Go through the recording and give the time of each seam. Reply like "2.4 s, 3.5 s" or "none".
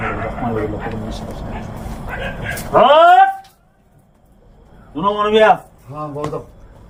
none